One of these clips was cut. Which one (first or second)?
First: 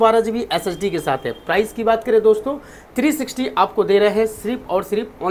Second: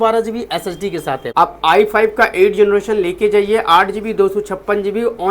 second